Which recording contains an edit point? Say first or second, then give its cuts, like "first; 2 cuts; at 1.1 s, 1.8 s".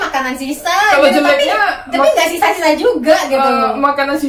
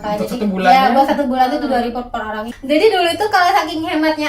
second; 1 cut; at 2.5 s